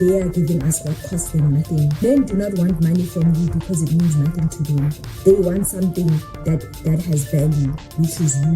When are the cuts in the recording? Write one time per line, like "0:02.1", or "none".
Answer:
0:02.0